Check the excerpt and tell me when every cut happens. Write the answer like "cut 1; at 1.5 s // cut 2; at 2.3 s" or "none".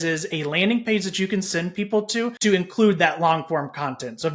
cut 1; at 2.3 s